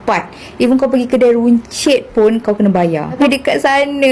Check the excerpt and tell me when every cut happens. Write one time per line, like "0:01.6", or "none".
0:03.0